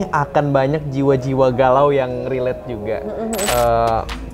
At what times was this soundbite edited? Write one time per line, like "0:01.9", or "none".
0:03.4